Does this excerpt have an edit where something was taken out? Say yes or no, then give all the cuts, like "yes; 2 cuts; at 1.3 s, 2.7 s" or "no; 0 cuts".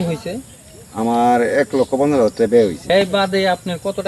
yes; 1 cut; at 2.9 s